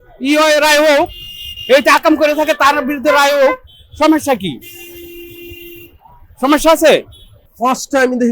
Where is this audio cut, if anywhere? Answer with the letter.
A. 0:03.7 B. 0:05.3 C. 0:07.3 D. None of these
C